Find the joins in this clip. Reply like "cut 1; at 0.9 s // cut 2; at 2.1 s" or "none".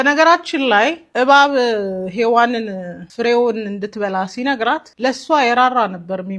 cut 1; at 1.0 s // cut 2; at 3.0 s // cut 3; at 4.8 s